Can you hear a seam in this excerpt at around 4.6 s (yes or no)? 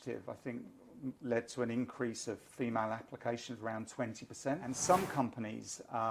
yes